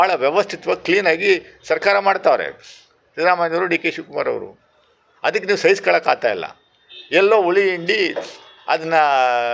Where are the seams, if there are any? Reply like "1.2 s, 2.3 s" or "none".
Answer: none